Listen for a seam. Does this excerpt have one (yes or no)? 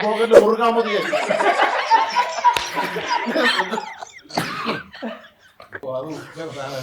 yes